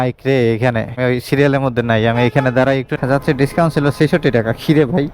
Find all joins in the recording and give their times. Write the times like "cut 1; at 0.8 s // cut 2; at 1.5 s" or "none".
cut 1; at 0.9 s // cut 2; at 3.0 s